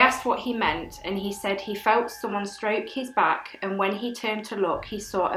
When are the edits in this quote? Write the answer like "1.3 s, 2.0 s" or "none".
none